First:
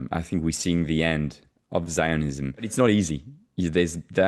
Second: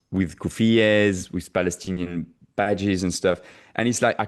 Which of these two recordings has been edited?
first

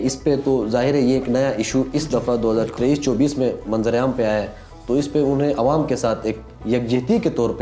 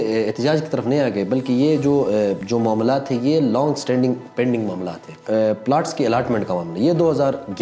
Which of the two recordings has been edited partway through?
second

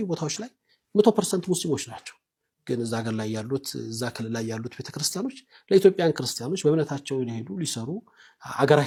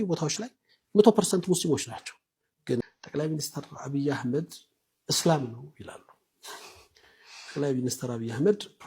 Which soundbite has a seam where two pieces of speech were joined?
second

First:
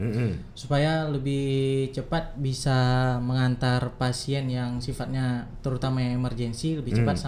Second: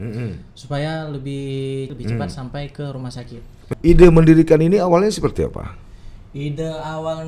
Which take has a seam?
second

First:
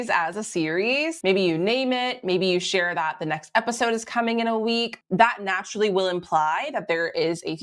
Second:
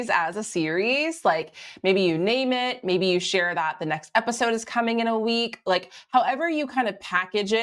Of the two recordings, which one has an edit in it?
first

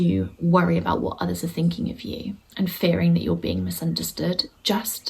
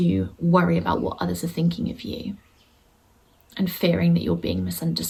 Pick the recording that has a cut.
first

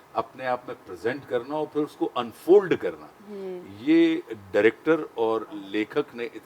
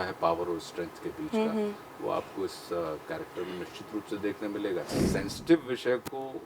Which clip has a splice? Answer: second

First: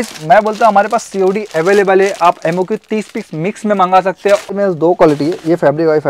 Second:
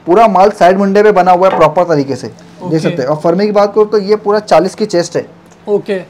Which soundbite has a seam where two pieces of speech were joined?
first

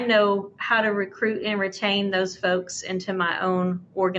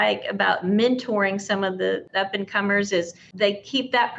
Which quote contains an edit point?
second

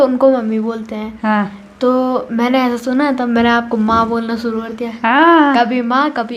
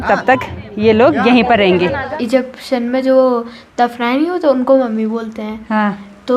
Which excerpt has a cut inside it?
second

